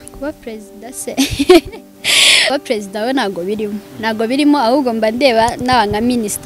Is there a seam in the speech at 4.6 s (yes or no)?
no